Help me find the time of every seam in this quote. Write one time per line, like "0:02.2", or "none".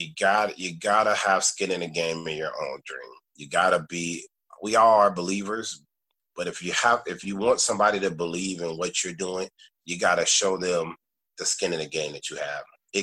0:04.5

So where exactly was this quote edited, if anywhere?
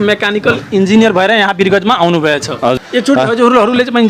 0:02.8

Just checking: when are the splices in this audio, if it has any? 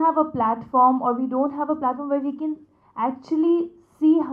none

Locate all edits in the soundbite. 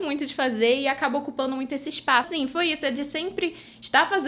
0:02.3

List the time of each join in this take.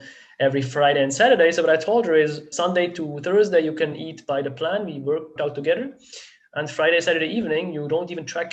0:02.5
0:04.0
0:05.4

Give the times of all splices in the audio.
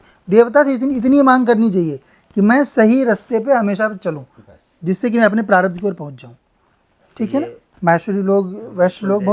0:07.6

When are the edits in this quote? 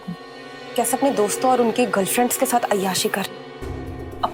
none

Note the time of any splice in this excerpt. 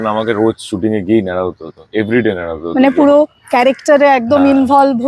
none

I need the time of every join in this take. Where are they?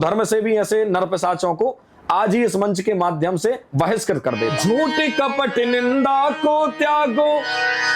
0:04.5

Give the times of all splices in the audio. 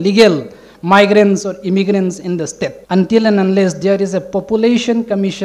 0:02.8

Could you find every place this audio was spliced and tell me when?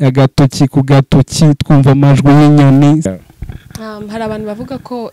0:03.1

